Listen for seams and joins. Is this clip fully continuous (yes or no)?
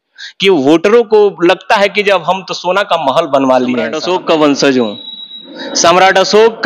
no